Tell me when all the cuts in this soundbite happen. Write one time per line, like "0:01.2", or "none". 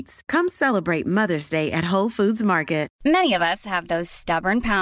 0:02.9

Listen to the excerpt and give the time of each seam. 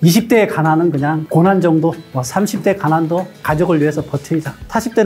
0:02.0
0:03.3

